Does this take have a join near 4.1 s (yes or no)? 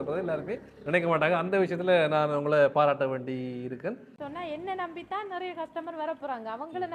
yes